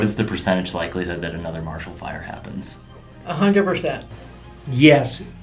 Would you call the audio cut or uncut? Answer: uncut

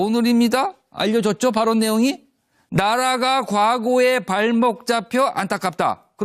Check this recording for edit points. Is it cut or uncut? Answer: cut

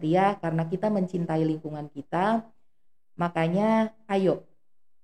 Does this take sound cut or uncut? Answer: uncut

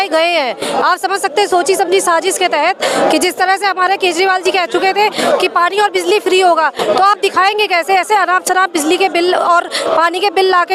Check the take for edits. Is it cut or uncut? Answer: uncut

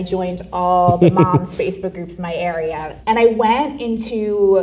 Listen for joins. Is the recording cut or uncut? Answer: cut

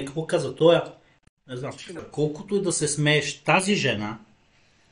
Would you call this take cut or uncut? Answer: cut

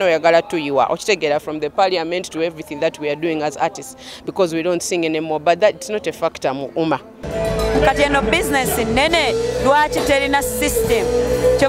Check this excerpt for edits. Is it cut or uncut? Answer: cut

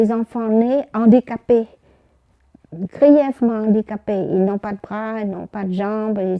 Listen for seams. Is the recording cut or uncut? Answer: uncut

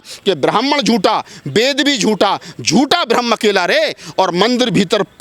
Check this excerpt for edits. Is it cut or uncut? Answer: uncut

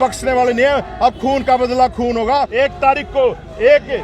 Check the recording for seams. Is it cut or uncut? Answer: cut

